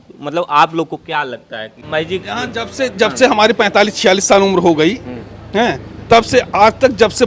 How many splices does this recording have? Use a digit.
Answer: 1